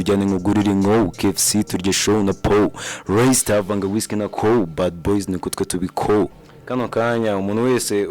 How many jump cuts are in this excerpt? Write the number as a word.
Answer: one